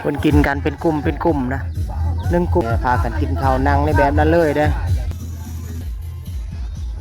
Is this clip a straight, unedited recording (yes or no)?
no